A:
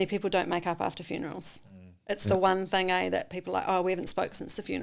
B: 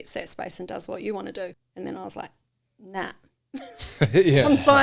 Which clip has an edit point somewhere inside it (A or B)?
B